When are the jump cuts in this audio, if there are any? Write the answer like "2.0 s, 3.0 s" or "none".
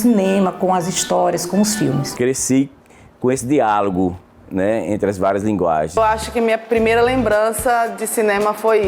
2.1 s, 6.0 s